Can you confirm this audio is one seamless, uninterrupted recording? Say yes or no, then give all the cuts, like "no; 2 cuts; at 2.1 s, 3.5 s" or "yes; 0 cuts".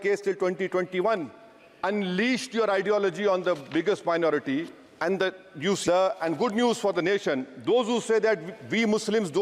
no; 2 cuts; at 1.8 s, 5.8 s